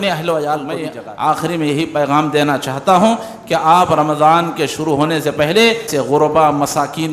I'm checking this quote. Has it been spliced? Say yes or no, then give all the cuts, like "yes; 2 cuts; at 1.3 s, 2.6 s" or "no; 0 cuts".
yes; 2 cuts; at 0.8 s, 5.9 s